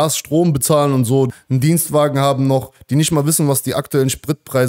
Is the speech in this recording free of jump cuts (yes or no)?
no